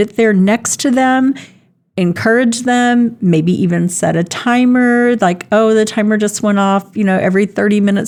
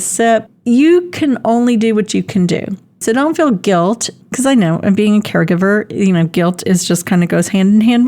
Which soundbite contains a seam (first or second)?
second